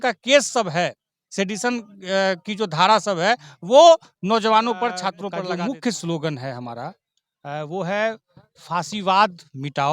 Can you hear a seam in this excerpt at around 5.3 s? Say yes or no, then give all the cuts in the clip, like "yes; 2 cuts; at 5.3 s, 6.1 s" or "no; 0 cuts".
yes; 1 cut; at 5.3 s